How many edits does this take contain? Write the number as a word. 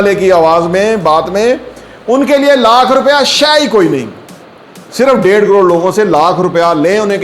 zero